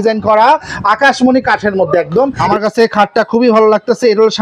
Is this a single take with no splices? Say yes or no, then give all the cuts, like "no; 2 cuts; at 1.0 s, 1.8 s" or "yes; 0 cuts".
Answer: no; 1 cut; at 2.4 s